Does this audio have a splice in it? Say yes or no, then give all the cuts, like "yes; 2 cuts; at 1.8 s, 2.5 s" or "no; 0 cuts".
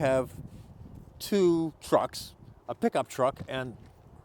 no; 0 cuts